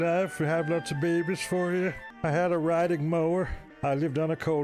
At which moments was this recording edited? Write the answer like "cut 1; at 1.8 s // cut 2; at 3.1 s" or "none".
cut 1; at 2.1 s // cut 2; at 3.6 s